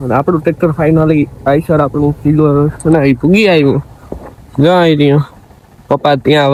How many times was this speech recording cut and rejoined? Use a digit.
0